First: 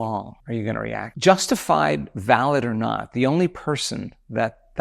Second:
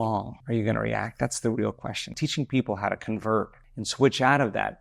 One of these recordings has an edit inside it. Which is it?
first; 1 cut; at 1.1 s

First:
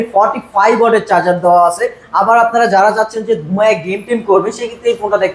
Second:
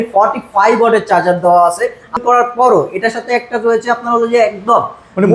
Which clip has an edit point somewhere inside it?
second; 1 cut; at 2.2 s

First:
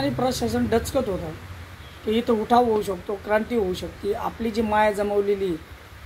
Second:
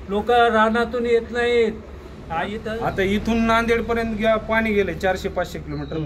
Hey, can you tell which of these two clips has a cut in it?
second; 1 cut; at 2.2 s

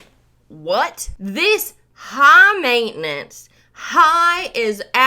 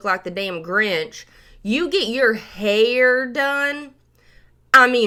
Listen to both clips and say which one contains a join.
first; 1 cut; at 1.1 s

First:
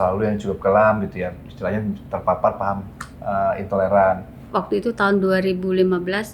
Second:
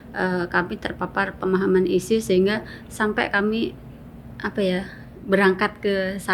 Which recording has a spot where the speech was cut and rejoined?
first; 1 cut; at 4.4 s

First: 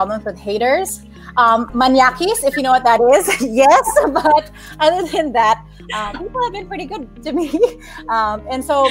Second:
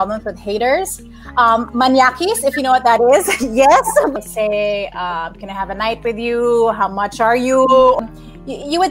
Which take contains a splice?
second; 2 cuts; at 4.1 s, 8.0 s

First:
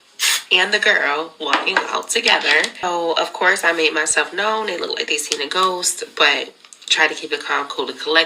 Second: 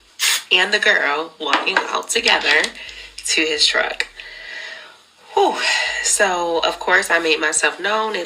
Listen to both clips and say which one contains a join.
first; 1 cut; at 2.8 s

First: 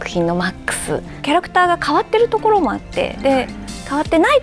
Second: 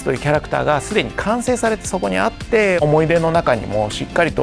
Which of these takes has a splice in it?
second; 1 cut; at 2.8 s

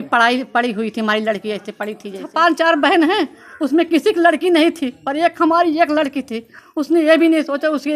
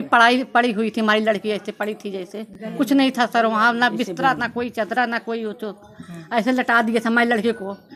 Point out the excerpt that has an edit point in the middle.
first; 1 cut; at 2.2 s

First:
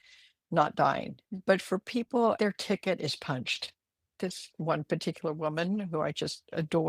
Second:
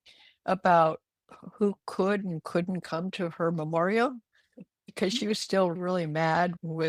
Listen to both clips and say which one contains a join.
first; 3 cuts; at 1.2 s, 2.4 s, 4.1 s

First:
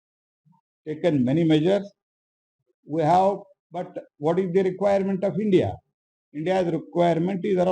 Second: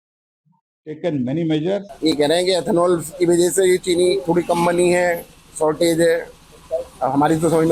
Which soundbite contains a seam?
second; 1 cut; at 1.9 s

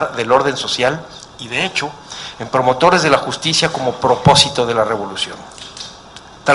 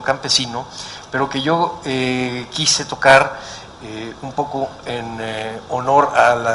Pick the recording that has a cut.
first; 1 cut; at 4.5 s

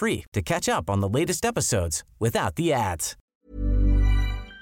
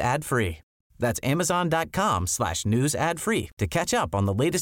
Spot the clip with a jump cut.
first; 1 cut; at 3.1 s

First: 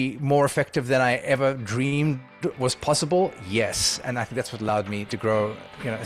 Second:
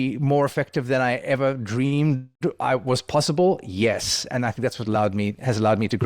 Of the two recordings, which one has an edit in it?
first; 2 cuts; at 2.6 s, 5.1 s

